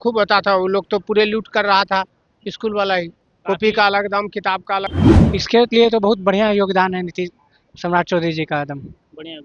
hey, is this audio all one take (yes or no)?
no